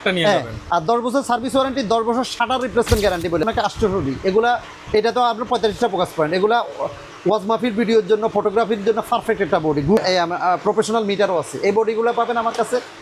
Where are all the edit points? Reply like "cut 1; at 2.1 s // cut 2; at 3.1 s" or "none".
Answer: cut 1; at 3.4 s // cut 2; at 10.0 s